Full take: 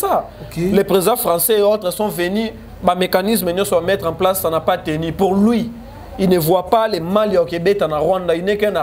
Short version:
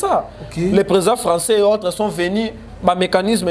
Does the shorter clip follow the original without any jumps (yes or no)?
yes